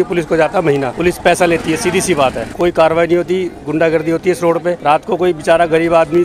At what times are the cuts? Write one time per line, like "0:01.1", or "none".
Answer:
none